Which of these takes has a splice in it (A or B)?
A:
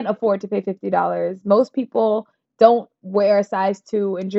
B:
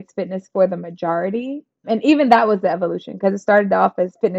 B